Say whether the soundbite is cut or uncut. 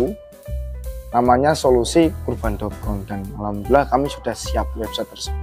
uncut